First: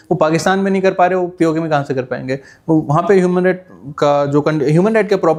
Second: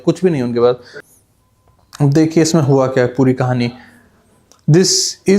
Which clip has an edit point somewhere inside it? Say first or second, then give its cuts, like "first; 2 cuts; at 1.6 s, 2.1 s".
second; 1 cut; at 0.9 s